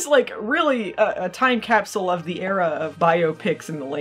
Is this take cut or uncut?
uncut